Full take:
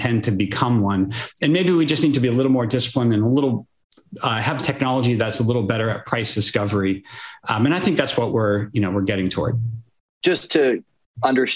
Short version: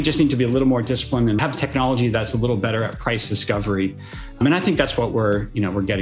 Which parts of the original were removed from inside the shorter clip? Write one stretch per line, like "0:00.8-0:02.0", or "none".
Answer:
0:03.2-0:04.4
0:07.4-0:07.6